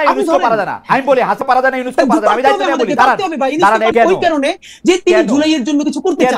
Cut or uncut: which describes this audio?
cut